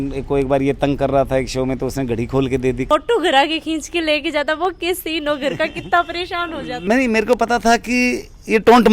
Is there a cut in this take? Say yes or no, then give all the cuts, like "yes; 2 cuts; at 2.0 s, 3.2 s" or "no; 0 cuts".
yes; 2 cuts; at 2.8 s, 6.7 s